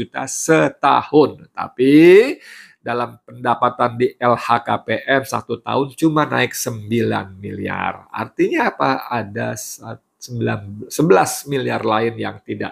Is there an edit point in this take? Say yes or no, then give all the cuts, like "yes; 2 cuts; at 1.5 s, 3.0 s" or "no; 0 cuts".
no; 0 cuts